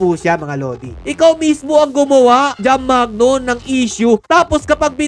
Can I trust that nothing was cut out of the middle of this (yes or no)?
no